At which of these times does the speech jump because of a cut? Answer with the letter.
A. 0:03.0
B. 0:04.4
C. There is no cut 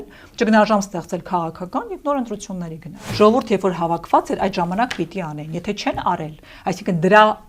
A